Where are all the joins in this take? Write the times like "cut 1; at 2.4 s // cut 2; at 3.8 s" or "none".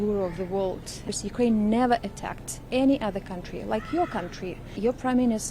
cut 1; at 1.1 s // cut 2; at 4.7 s

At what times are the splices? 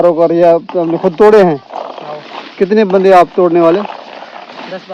none

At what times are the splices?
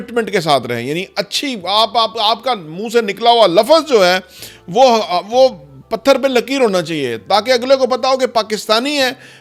none

